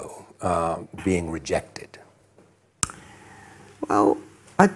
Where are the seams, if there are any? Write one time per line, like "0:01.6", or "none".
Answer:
none

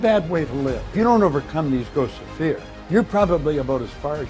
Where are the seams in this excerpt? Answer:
0:00.9
0:02.7

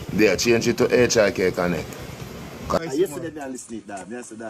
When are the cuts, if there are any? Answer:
0:02.8

